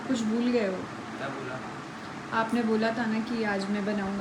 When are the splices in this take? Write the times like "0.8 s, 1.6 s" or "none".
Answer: none